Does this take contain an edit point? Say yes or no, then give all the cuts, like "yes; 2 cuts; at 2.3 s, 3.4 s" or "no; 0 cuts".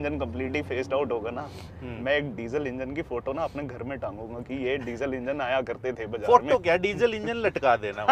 no; 0 cuts